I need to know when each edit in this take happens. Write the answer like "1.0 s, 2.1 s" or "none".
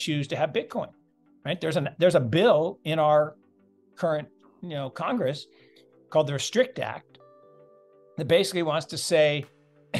none